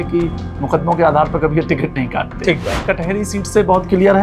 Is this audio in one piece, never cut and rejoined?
no; 1 cut; at 2.8 s

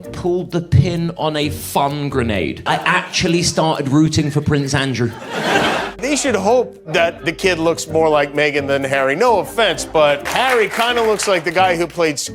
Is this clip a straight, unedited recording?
no; 1 cut; at 5.9 s

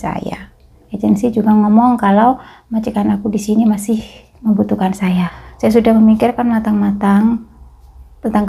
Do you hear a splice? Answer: yes; 2 cuts; at 0.9 s, 5.3 s

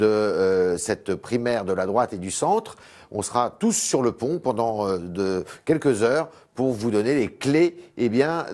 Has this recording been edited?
no; 0 cuts

